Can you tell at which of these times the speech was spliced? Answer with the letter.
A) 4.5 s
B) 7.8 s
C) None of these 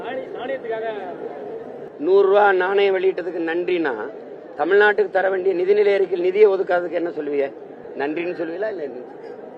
B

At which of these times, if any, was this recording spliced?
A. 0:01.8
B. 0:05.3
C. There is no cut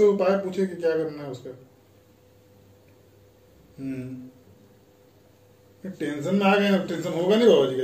C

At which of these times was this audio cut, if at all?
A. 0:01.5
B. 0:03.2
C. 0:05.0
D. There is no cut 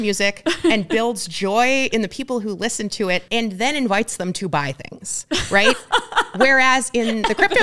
B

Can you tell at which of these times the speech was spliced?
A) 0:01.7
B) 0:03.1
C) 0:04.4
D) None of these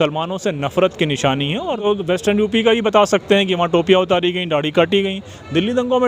A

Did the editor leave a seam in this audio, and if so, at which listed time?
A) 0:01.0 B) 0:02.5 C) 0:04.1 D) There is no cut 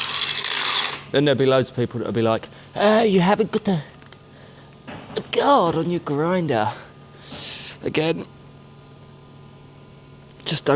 D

